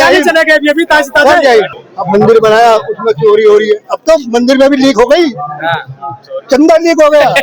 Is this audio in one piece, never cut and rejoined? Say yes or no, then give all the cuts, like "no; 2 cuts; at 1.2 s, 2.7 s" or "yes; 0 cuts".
no; 1 cut; at 1.7 s